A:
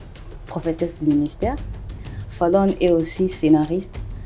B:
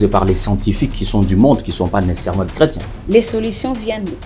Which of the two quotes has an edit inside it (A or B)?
B